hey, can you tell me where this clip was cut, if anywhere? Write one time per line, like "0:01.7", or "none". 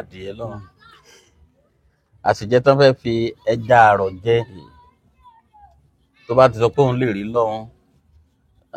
none